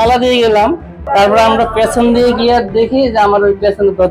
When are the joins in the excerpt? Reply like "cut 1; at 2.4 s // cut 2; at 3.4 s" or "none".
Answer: cut 1; at 0.9 s

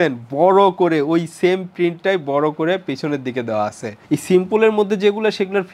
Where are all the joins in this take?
cut 1; at 3.9 s

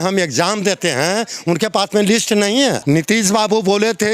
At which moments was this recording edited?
cut 1; at 2.8 s

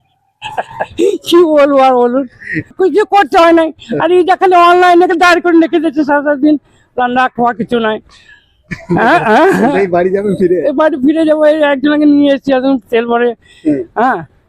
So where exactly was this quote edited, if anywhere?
none

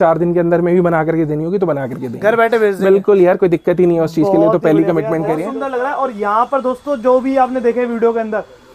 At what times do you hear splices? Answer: cut 1; at 5.4 s

